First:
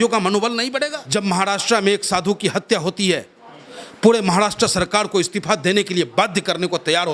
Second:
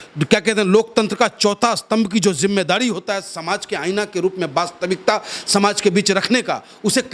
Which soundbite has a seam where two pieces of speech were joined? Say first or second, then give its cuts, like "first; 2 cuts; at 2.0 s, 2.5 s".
first; 1 cut; at 1.0 s